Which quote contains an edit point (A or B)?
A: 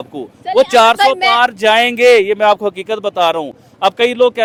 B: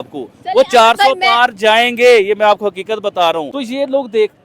B